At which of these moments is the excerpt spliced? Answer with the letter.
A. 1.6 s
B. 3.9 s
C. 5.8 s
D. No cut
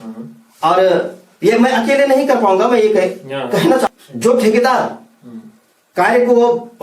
B